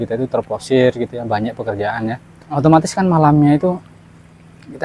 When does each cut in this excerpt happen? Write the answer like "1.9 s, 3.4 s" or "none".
2.6 s